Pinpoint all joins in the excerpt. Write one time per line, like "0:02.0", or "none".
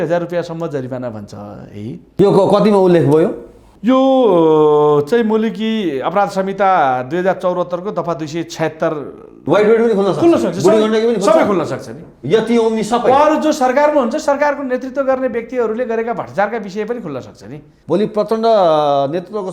0:02.1
0:09.4
0:17.7